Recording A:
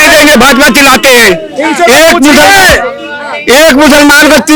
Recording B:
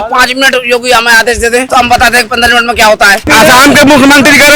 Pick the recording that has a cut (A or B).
B